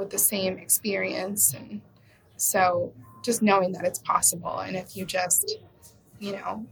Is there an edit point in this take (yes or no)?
no